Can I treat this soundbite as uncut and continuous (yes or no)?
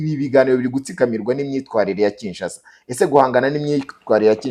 yes